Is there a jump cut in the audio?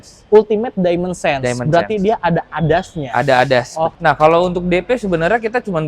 yes; 1 cut; at 3.9 s

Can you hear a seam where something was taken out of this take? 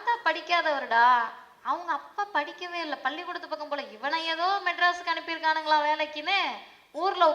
no; 0 cuts

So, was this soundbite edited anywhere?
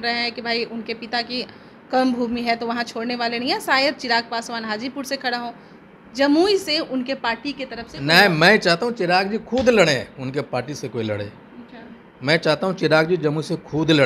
no; 0 cuts

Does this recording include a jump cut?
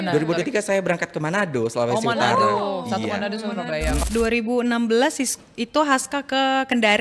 yes; 1 cut; at 4.0 s

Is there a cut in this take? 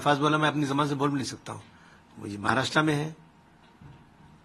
no; 0 cuts

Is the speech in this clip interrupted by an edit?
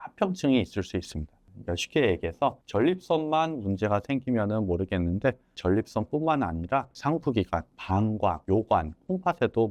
no; 0 cuts

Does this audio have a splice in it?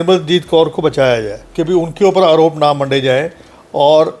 yes; 1 cut; at 1.4 s

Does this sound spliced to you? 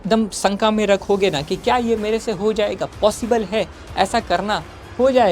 no; 0 cuts

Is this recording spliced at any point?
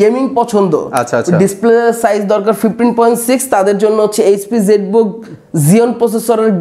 no; 0 cuts

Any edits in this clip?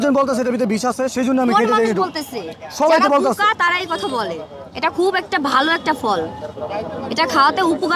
no; 0 cuts

